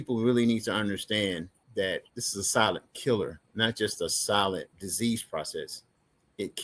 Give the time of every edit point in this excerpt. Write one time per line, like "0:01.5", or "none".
0:02.2
0:03.4
0:04.8